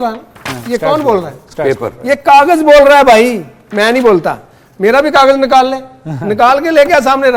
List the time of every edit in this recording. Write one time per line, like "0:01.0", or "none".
none